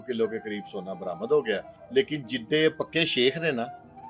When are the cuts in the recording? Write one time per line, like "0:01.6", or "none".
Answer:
0:01.7